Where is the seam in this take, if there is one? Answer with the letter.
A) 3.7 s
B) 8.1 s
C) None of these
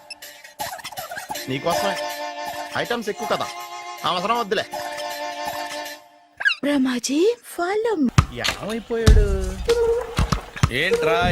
B